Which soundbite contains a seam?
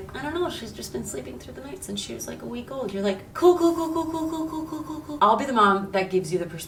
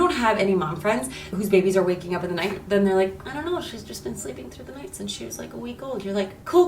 second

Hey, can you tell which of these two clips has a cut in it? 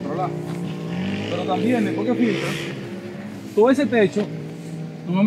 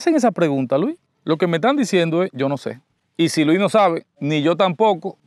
second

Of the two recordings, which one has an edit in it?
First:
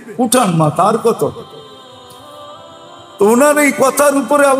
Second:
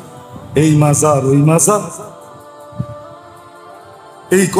first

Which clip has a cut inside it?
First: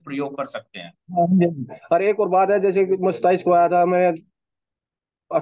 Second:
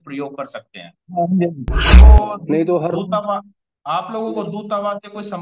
second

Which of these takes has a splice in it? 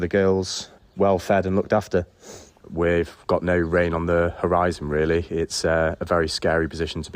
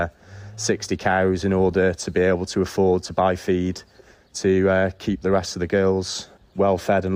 first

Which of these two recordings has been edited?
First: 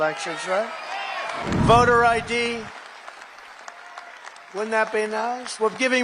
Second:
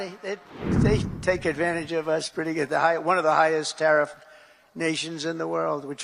first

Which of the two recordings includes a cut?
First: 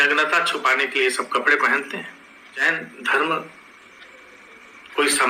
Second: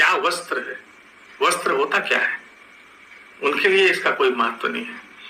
first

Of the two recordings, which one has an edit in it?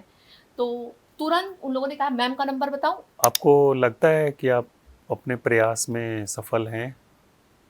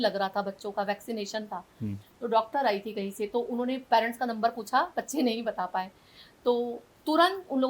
first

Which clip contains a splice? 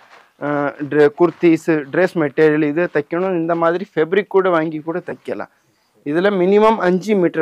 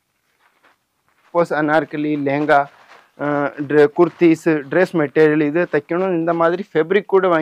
second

